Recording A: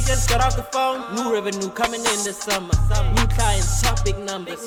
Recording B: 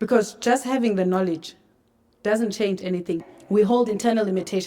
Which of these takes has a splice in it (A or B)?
B